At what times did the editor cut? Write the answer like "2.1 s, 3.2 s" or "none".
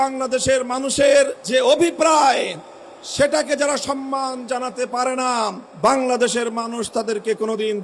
1.4 s, 5.6 s